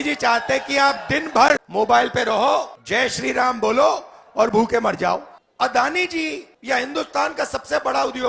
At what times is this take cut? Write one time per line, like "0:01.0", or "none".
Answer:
0:01.7
0:02.8
0:05.4
0:06.5